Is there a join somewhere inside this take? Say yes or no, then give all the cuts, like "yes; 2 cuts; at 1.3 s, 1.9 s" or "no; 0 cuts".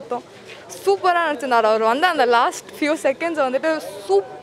no; 0 cuts